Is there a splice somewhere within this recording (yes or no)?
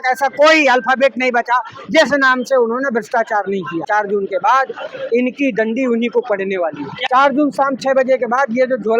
yes